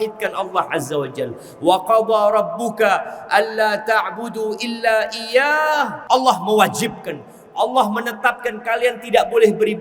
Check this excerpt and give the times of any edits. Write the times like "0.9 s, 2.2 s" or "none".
6.0 s